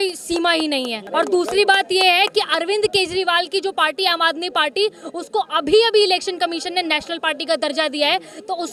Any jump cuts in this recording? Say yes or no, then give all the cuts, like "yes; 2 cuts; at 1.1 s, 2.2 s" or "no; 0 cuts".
no; 0 cuts